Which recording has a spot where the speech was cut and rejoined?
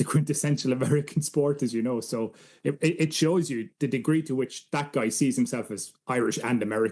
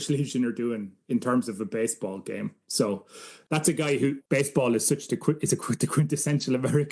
second; 2 cuts; at 3.3 s, 4.2 s

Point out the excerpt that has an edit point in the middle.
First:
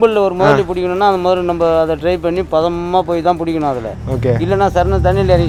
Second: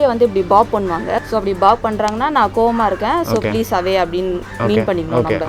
second; 1 cut; at 1.2 s

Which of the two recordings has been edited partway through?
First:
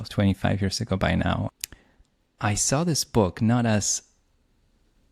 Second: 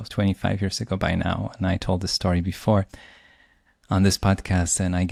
first; 1 cut; at 1.5 s

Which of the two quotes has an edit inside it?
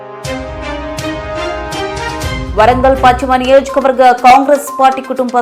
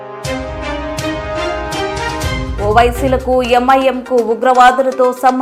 first; 1 cut; at 2.4 s

